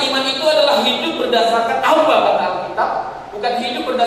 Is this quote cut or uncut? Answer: uncut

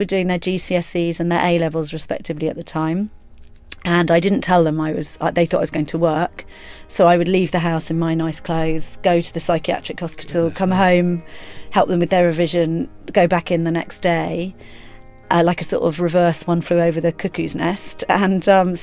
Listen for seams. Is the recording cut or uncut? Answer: uncut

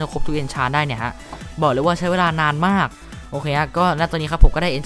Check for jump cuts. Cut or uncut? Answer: cut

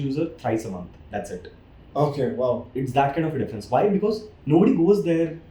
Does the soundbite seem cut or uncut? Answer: uncut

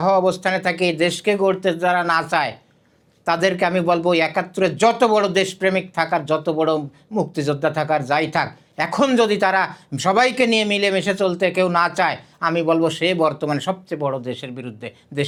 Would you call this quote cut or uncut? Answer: uncut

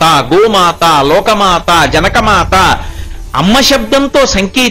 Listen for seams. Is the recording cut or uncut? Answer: uncut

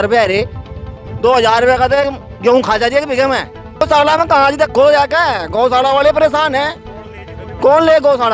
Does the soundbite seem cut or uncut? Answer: cut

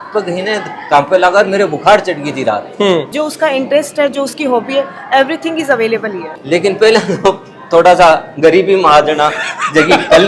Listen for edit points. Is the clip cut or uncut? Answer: cut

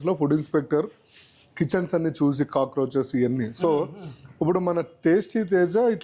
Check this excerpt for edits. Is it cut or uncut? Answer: uncut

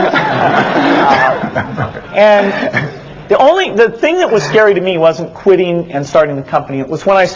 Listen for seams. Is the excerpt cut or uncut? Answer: uncut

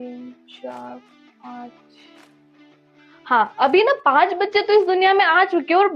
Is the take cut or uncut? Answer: uncut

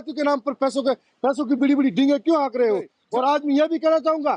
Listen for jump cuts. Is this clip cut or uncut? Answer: cut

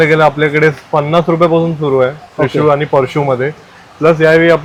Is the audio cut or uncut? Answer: uncut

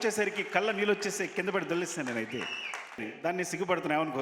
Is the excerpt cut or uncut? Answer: cut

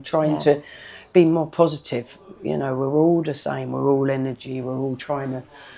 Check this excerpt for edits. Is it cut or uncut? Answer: uncut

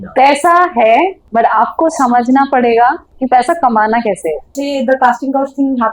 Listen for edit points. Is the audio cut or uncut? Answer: cut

